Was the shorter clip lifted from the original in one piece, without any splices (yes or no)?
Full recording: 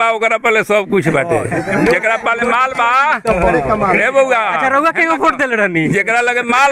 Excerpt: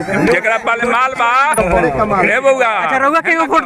no